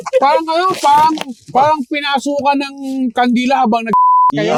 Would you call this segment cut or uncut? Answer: uncut